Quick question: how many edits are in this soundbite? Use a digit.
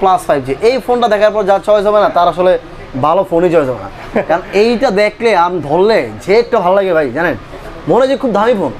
0